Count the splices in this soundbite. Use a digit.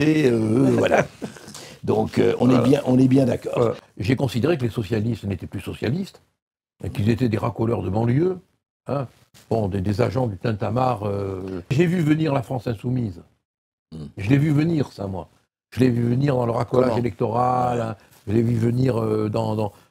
2